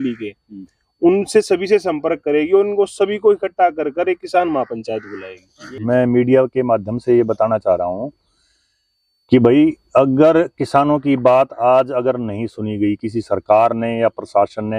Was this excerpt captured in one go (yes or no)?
no